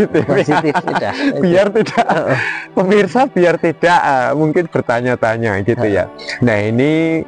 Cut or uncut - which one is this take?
uncut